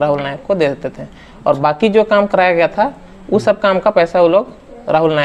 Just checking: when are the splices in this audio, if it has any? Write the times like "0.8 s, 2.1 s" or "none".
none